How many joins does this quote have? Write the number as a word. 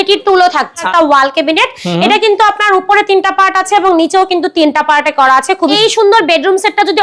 two